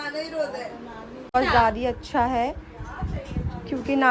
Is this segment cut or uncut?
cut